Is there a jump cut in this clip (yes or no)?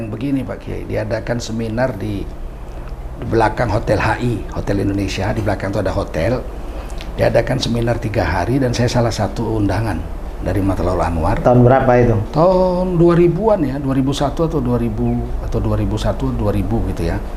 no